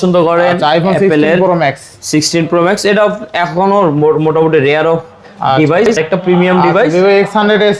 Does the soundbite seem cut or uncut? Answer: cut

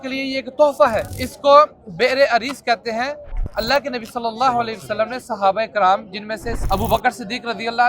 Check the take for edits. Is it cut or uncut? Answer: uncut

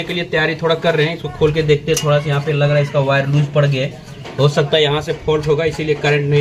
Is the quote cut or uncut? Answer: uncut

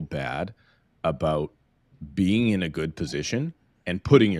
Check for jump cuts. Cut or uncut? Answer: uncut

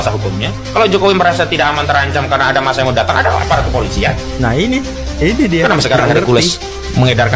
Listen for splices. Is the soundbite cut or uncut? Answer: uncut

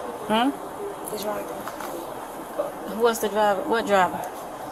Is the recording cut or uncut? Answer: uncut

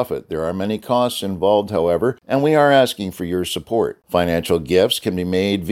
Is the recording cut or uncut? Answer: cut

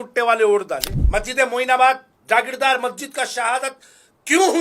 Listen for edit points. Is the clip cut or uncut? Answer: cut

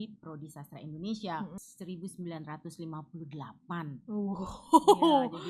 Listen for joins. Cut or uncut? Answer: cut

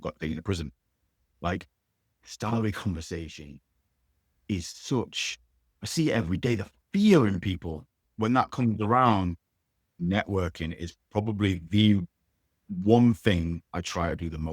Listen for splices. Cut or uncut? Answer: cut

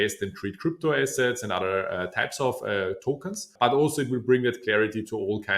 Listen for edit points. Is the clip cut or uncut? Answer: cut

